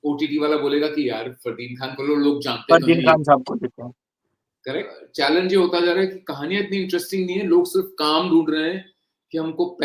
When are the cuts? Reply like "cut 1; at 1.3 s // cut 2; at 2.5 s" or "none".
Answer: cut 1; at 5.0 s